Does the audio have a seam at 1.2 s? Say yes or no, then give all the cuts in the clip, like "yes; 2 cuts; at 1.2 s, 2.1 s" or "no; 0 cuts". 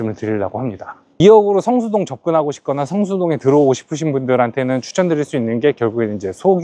yes; 1 cut; at 1.2 s